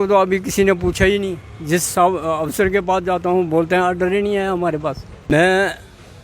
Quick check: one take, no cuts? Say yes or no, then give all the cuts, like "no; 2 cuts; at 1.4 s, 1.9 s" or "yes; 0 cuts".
no; 1 cut; at 5.1 s